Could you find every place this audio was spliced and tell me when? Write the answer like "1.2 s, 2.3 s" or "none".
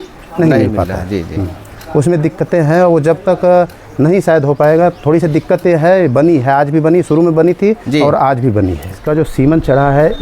8.9 s